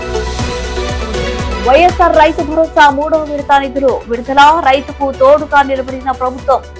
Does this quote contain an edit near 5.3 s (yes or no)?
no